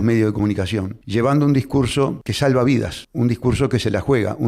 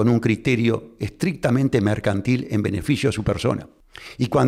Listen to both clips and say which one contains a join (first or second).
first